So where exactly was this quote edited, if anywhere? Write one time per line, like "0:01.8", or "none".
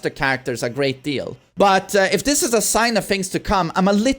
0:01.4